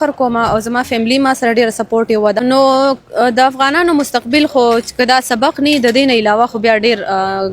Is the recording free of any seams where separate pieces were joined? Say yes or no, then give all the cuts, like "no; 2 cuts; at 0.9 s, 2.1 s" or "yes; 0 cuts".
no; 1 cut; at 2.4 s